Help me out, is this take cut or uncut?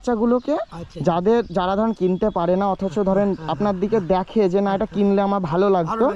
uncut